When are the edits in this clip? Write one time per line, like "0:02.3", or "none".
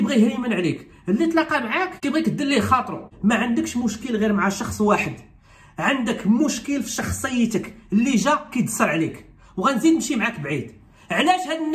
0:01.9
0:03.0